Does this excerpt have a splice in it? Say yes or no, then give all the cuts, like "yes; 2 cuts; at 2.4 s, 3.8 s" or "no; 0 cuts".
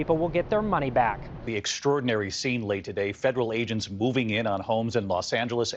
yes; 1 cut; at 1.4 s